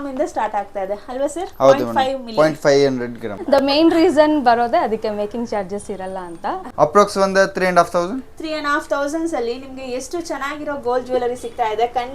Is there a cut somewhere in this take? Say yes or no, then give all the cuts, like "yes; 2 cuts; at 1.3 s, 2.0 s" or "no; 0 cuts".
yes; 2 cuts; at 3.3 s, 6.6 s